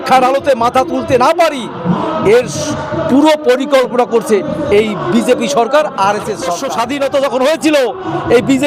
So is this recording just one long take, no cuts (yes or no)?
no